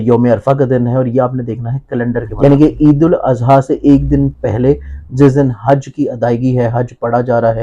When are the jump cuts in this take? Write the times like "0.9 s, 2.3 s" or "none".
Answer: 2.3 s